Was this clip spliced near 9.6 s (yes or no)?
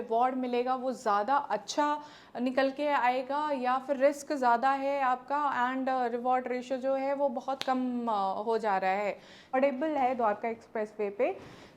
yes